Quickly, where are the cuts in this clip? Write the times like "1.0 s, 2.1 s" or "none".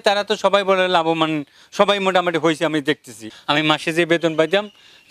3.3 s